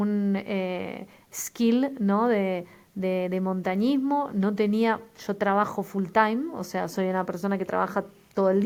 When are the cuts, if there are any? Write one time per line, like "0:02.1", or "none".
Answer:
none